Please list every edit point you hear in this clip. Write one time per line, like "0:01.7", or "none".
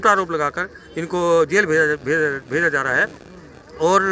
none